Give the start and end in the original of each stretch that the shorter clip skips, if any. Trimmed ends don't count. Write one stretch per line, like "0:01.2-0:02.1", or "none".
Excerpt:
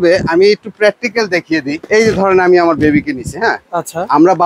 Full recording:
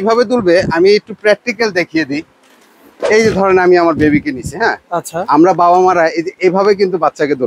0:02.3-0:03.1